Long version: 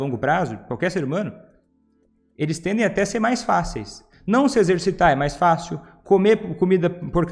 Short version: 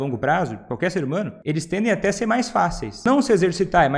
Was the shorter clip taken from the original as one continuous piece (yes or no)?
no